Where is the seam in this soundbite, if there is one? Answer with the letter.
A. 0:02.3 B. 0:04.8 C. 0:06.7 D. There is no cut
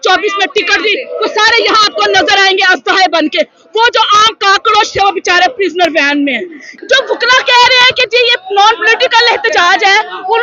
C